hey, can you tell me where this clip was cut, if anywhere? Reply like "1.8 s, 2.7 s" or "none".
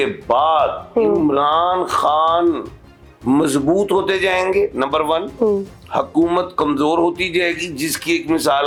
none